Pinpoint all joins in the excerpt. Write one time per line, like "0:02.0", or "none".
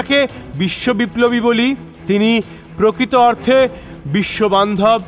0:01.9